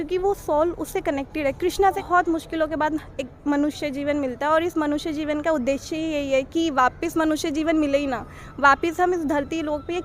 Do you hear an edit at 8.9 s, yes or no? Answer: no